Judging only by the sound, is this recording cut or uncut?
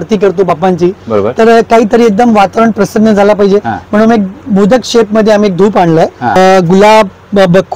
cut